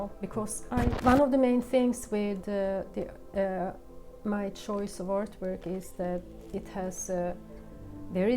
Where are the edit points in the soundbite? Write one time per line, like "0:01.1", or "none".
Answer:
0:01.0